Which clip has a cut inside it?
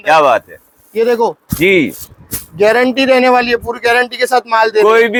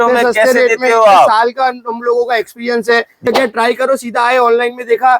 second; 1 cut; at 3.2 s

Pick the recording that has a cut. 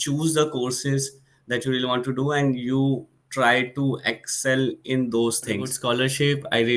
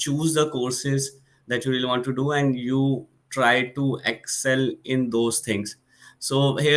first; 1 cut; at 5.7 s

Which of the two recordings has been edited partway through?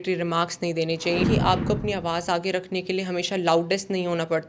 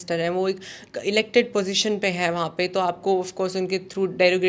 first; 1 cut; at 1.2 s

